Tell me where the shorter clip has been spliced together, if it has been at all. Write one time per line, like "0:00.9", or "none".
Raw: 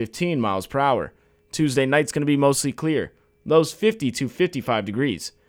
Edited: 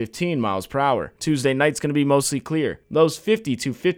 0:01.1
0:02.8